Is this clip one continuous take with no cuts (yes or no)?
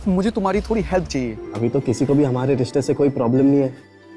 no